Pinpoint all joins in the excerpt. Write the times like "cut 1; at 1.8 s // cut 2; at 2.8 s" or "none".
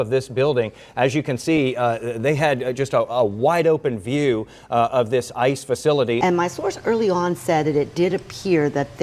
cut 1; at 6.2 s